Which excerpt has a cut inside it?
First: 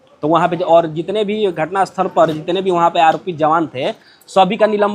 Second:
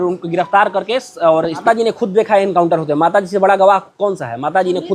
second; 1 cut; at 1.6 s

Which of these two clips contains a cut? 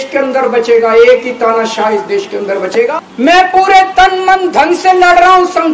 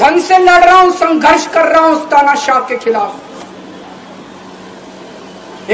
first; 1 cut; at 2.9 s

